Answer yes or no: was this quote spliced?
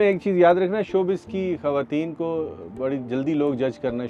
no